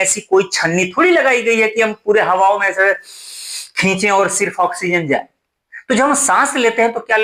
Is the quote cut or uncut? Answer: uncut